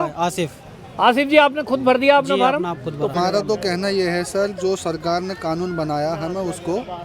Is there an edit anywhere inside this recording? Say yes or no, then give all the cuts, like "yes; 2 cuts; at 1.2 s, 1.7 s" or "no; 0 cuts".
yes; 1 cut; at 3.1 s